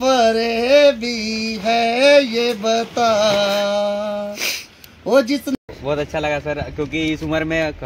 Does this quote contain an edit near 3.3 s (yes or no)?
no